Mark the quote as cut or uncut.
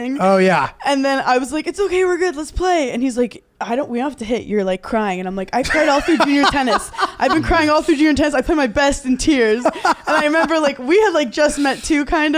uncut